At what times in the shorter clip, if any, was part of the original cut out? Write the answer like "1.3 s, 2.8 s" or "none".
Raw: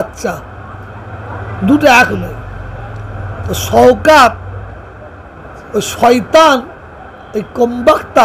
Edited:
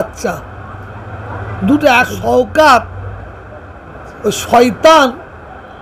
2.2 s